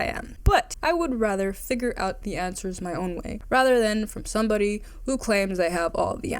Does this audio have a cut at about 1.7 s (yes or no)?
no